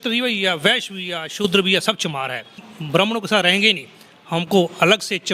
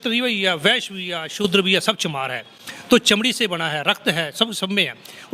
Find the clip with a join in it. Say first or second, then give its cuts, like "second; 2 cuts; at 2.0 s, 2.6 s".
first; 1 cut; at 2.7 s